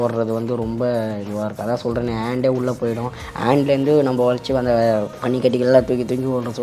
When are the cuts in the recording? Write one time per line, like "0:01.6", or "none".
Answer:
0:05.1